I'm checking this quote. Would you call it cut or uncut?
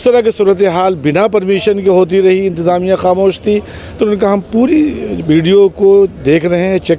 uncut